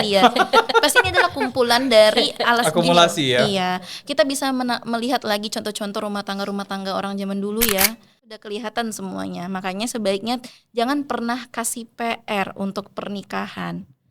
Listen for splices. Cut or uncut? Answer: cut